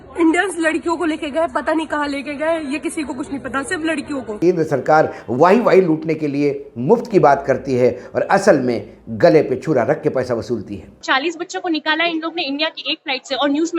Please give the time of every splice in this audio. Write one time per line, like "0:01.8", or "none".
0:04.4
0:11.0